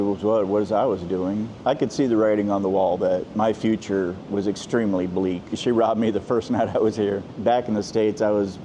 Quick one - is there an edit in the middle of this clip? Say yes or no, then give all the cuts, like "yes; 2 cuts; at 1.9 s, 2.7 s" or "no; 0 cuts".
yes; 3 cuts; at 1.5 s, 5.6 s, 7.3 s